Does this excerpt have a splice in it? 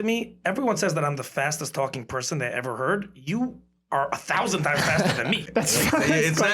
yes; 1 cut; at 5.4 s

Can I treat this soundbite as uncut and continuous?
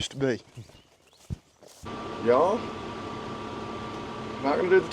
no; 1 cut; at 1.9 s

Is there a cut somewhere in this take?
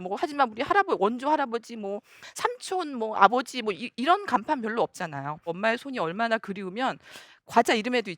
yes; 1 cut; at 5.5 s

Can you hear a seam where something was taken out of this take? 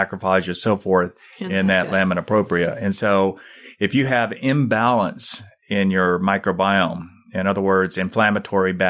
no; 0 cuts

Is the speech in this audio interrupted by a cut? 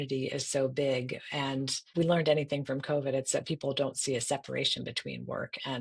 yes; 1 cut; at 1.9 s

